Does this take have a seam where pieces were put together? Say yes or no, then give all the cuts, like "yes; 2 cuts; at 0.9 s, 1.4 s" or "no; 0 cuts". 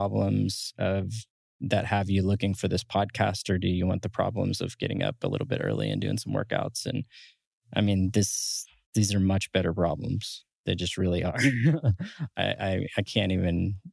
no; 0 cuts